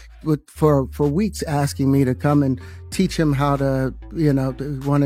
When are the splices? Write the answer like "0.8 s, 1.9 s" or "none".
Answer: none